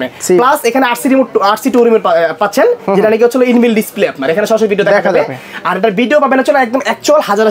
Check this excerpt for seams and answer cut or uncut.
uncut